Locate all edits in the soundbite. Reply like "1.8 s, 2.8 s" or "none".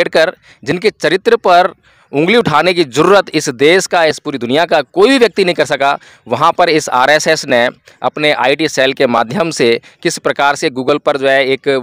none